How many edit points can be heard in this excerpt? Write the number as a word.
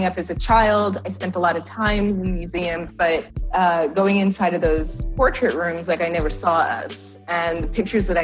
zero